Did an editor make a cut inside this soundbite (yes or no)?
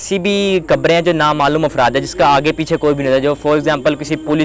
no